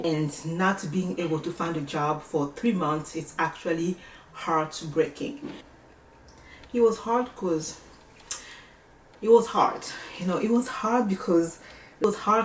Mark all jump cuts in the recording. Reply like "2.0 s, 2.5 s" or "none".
5.7 s